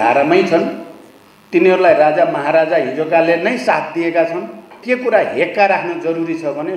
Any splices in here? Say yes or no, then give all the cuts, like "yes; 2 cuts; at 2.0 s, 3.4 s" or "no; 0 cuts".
yes; 1 cut; at 4.7 s